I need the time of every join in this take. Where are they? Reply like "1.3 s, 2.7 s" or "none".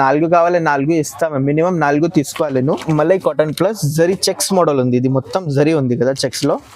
2.8 s